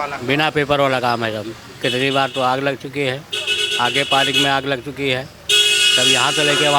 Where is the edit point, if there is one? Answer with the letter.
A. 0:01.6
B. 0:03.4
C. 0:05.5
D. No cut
A